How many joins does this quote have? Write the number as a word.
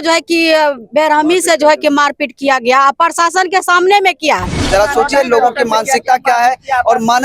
one